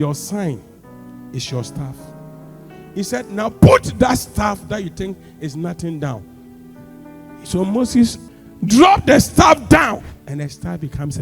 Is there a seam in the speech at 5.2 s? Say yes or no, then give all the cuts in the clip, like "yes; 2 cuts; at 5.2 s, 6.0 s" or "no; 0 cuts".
no; 2 cuts; at 8.3 s, 10.1 s